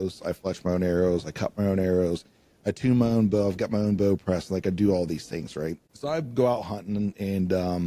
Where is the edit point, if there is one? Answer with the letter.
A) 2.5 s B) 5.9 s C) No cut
B